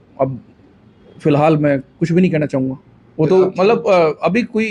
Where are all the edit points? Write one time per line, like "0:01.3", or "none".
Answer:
none